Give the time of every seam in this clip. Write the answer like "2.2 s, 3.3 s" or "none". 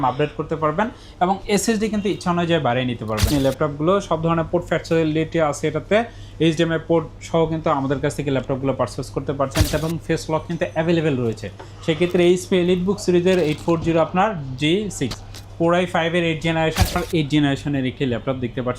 3.3 s, 9.7 s, 17.0 s